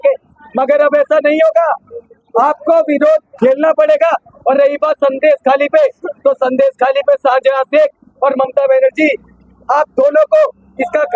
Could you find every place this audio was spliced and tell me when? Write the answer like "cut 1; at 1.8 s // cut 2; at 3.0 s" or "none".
none